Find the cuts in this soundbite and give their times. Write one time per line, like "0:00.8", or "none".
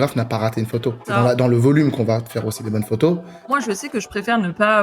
0:01.1
0:03.5